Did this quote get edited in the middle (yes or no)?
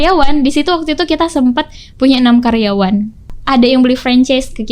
yes